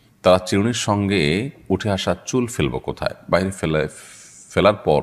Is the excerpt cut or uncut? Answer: uncut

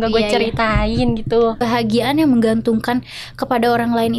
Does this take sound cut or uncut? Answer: cut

